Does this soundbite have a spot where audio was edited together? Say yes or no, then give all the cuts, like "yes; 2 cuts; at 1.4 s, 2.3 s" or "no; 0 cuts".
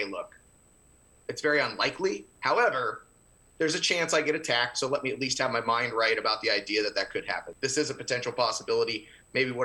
yes; 1 cut; at 7.5 s